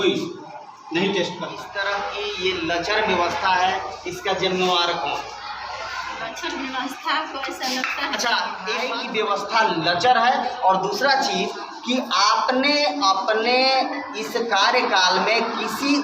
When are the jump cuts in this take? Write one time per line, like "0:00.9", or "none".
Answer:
0:01.6
0:08.8